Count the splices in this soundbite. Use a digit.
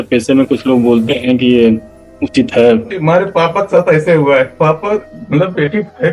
2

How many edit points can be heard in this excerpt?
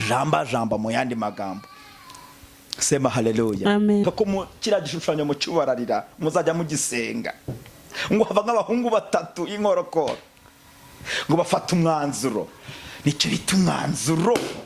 1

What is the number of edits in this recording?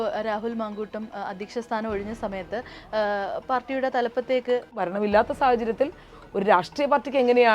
1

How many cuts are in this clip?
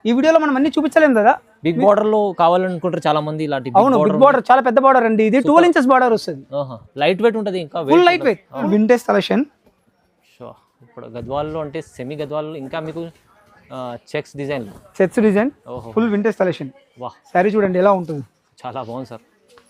1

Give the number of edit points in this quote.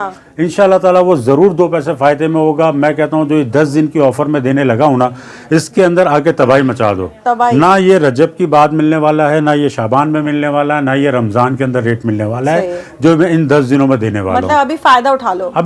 0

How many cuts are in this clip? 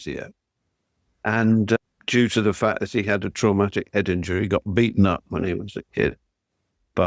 0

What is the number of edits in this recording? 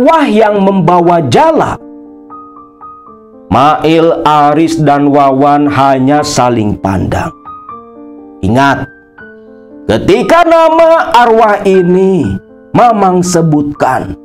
2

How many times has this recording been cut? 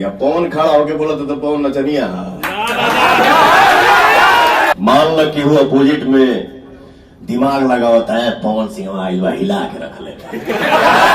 1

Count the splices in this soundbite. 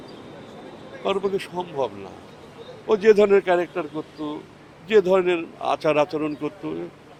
0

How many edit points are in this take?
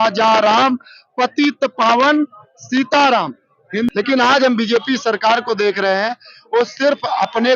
1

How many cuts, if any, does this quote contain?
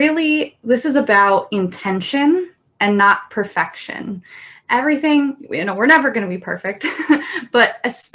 0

